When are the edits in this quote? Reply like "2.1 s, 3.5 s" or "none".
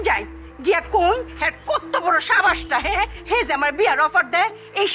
none